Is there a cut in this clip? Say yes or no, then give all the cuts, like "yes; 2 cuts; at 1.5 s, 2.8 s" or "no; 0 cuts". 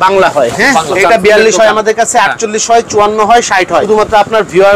yes; 2 cuts; at 0.9 s, 3.8 s